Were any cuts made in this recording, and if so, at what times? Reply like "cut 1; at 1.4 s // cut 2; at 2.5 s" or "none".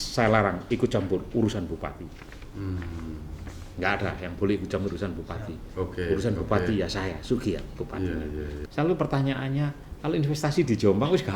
cut 1; at 8.5 s